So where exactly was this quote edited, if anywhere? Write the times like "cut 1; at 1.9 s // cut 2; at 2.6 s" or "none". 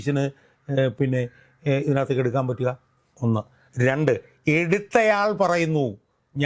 none